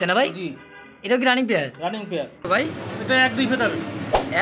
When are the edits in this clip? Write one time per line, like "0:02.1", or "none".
0:02.4